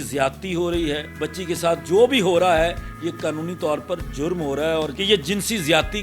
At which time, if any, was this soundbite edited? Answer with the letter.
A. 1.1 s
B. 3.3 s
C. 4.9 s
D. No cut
C